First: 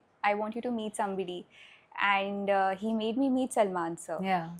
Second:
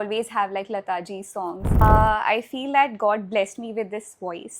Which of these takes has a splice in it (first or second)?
second